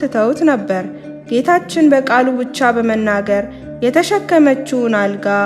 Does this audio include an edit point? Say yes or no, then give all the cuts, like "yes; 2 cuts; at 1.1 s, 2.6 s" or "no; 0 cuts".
no; 0 cuts